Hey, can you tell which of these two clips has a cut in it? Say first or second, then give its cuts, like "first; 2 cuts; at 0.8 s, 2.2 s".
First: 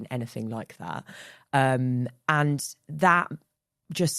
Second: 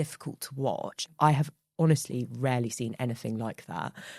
second; 1 cut; at 1.0 s